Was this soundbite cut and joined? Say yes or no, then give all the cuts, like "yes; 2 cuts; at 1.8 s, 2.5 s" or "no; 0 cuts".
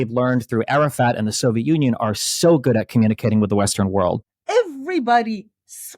yes; 1 cut; at 4.3 s